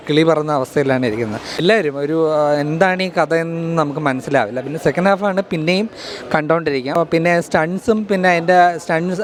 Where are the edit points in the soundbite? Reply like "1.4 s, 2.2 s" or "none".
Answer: none